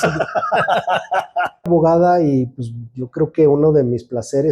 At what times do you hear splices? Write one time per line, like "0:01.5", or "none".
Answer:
0:01.7